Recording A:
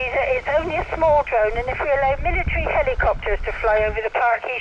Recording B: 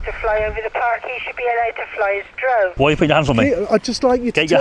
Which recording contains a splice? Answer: B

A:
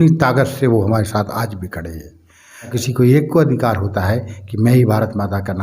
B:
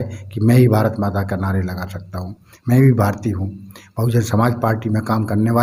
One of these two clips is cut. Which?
A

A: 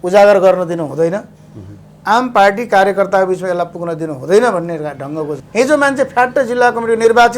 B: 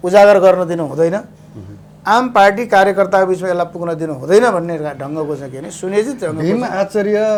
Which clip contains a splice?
A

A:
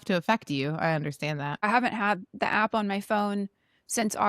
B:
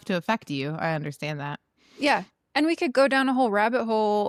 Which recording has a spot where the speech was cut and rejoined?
A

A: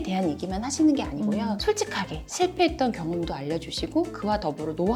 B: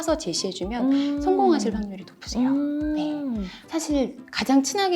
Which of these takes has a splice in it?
B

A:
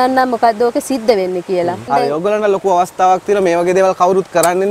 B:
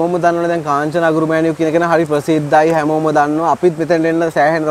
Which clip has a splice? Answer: A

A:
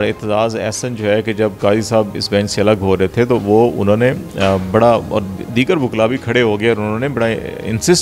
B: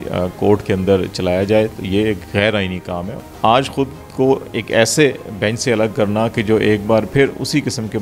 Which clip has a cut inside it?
B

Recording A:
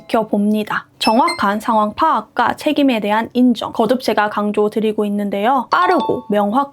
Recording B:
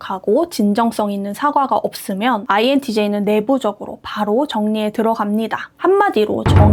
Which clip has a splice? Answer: A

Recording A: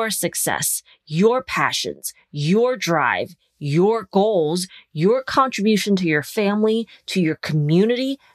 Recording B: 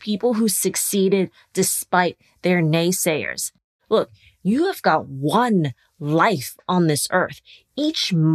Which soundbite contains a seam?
B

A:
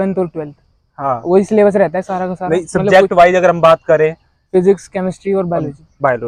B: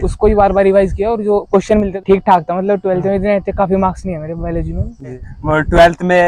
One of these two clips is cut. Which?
B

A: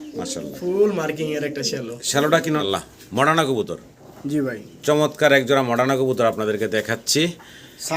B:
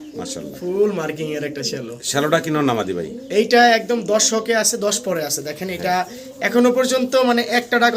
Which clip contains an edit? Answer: A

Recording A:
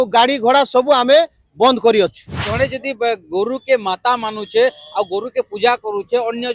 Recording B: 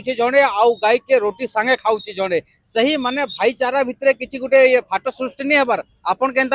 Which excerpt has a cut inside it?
A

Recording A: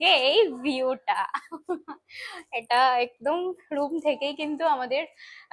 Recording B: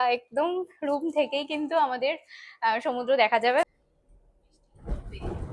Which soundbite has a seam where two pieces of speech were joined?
B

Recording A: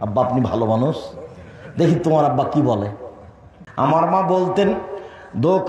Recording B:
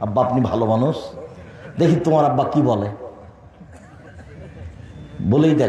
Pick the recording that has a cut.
A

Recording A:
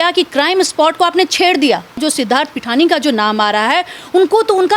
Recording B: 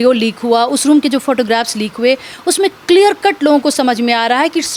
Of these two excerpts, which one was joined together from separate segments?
A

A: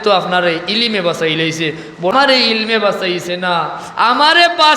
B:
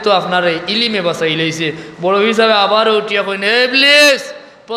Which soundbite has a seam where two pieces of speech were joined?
A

